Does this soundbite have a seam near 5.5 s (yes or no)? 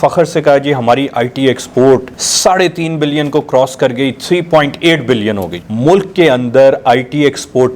yes